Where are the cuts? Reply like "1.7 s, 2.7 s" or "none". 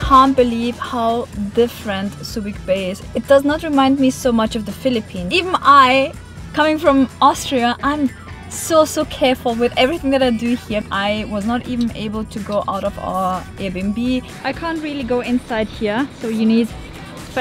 3.0 s, 5.2 s, 10.8 s, 14.3 s